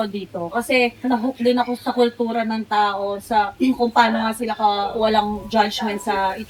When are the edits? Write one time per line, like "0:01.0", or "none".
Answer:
none